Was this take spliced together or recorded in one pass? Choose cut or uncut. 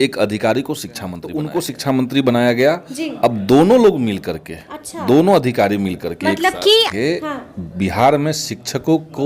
cut